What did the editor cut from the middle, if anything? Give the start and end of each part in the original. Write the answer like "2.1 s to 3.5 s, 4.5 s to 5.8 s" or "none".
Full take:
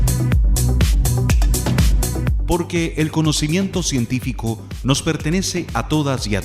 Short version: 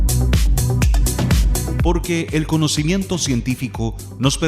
2.3 s to 2.4 s

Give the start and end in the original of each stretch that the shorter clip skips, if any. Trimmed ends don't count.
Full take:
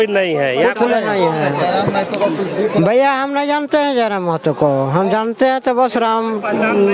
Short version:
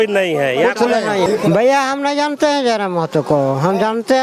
1.3 s to 2.6 s

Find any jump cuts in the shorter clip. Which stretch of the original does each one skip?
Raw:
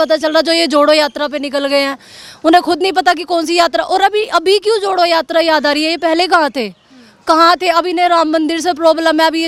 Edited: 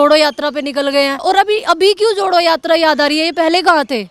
2.0 s to 3.9 s

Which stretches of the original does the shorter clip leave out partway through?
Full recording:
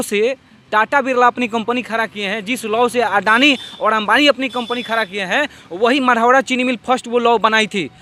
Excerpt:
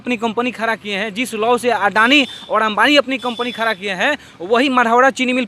none

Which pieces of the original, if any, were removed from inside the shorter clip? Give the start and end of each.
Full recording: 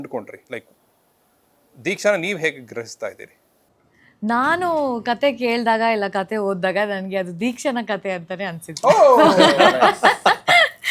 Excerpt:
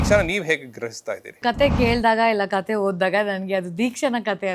3.3 s to 5.0 s

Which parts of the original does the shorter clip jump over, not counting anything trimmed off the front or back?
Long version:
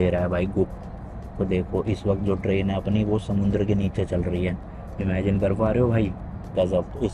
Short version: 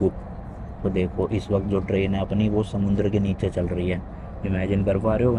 none

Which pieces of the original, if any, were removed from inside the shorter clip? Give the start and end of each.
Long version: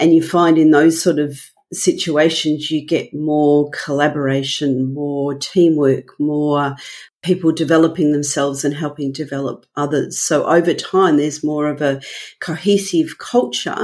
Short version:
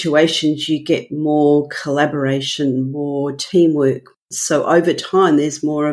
6.2 s to 10.0 s

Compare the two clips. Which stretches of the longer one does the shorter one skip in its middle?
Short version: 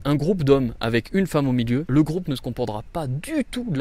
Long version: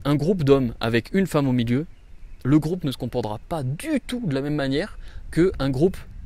1.9 s to 2.4 s

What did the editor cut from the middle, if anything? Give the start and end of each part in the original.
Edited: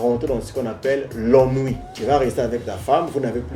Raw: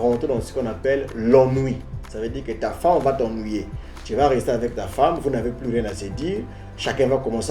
1.9 s to 4.0 s

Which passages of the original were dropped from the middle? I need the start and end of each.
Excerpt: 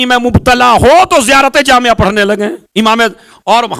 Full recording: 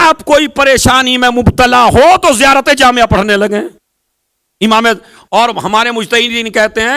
3.7 s to 4.5 s

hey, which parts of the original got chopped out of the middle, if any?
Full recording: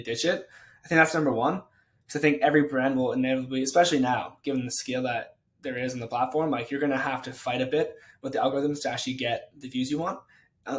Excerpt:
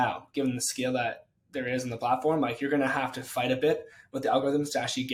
none

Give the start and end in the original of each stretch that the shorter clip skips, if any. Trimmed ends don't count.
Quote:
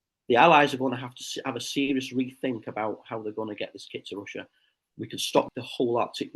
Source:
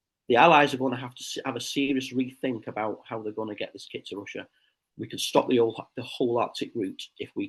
5.5 s to 5.9 s

